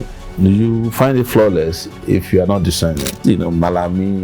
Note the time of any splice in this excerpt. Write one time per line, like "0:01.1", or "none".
0:03.2